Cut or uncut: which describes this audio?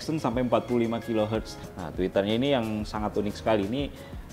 cut